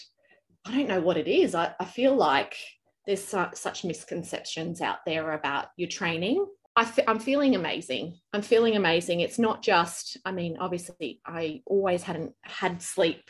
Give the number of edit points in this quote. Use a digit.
1